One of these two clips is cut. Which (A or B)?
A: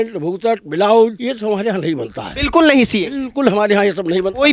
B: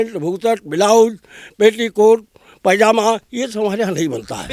A